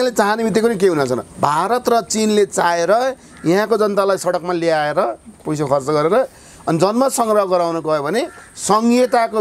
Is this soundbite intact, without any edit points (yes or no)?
no